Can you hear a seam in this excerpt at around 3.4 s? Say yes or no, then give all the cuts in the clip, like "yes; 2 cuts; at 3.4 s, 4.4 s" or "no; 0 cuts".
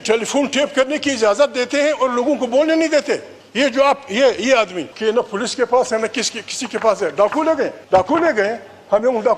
yes; 3 cuts; at 3.4 s, 4.9 s, 7.8 s